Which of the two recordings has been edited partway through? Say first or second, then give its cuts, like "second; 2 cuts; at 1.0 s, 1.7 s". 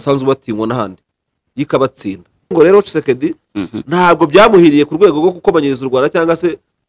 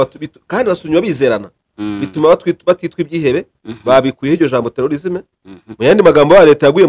first; 1 cut; at 2.5 s